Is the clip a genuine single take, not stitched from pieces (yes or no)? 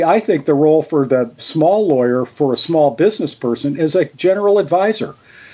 no